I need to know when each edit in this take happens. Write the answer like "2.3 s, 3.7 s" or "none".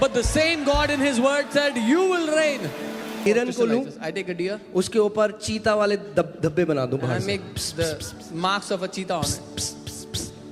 3.2 s